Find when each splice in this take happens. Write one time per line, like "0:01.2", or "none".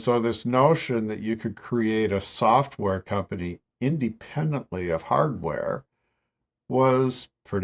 none